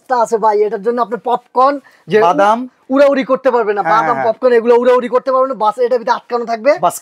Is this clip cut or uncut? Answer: uncut